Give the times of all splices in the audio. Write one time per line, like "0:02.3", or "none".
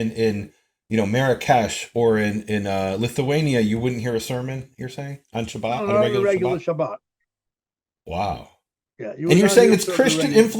none